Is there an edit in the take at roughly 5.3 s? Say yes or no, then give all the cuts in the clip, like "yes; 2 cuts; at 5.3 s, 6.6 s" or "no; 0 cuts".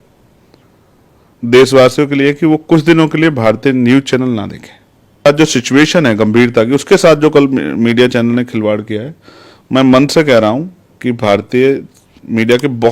yes; 1 cut; at 5.3 s